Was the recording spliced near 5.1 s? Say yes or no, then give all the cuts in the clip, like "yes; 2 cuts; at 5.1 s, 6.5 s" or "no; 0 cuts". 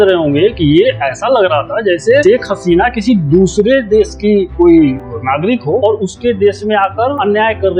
yes; 1 cut; at 5.1 s